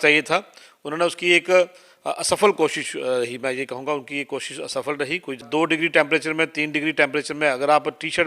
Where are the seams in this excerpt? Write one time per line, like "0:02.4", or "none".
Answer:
0:05.4